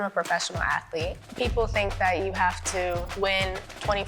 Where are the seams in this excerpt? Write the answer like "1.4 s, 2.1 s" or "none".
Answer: 1.2 s, 3.3 s